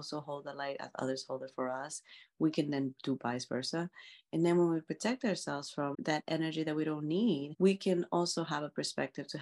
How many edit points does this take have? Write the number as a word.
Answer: two